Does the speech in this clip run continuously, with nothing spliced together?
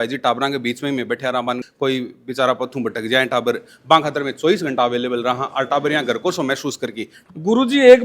no; 2 cuts; at 1.6 s, 7.1 s

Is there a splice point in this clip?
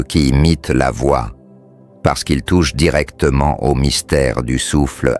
no; 0 cuts

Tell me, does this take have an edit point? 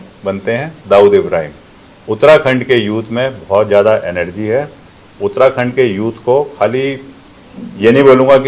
no; 0 cuts

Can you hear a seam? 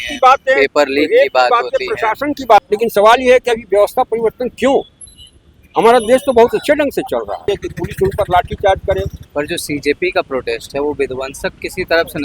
yes; 3 cuts; at 2.6 s, 7.5 s, 9.2 s

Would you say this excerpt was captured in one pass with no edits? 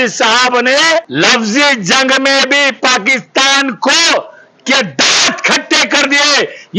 no; 1 cut; at 1.1 s

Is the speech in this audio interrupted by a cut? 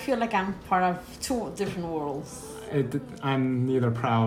yes; 1 cut; at 2.1 s

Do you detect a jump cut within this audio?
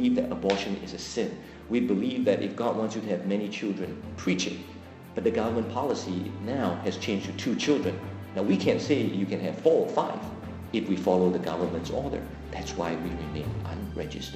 no; 0 cuts

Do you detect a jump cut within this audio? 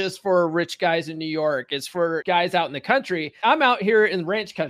yes; 2 cuts; at 2.2 s, 3.3 s

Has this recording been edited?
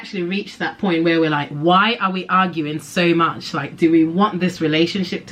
no; 0 cuts

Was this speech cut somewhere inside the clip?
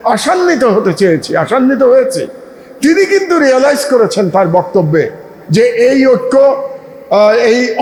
no; 0 cuts

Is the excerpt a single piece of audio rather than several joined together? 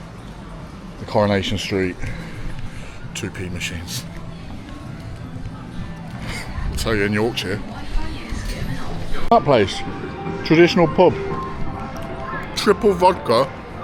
no; 1 cut; at 9.2 s

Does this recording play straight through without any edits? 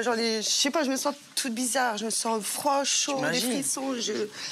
yes; 0 cuts

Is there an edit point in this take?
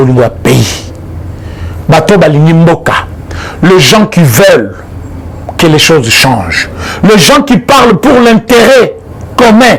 no; 0 cuts

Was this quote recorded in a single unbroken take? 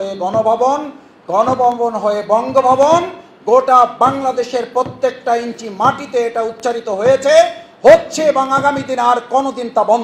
yes; 0 cuts

